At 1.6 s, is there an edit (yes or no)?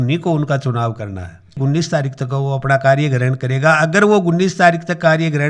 yes